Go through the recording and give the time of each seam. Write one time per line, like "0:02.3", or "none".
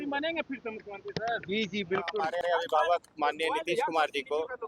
0:02.3